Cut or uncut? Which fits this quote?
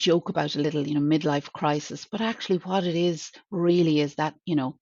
uncut